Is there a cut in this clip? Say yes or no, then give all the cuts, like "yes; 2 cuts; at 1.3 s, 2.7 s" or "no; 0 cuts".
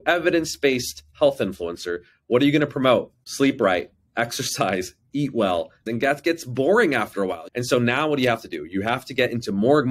yes; 2 cuts; at 5.9 s, 7.4 s